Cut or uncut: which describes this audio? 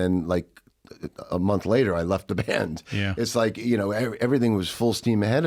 uncut